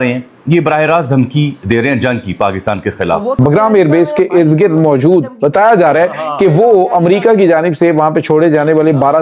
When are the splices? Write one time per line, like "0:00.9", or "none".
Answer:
0:03.4